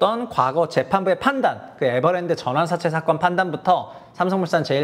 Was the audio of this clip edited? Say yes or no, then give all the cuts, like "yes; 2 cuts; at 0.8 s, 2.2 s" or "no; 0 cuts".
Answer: no; 0 cuts